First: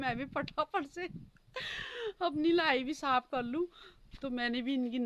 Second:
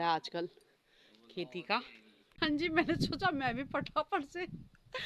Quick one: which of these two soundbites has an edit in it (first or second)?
second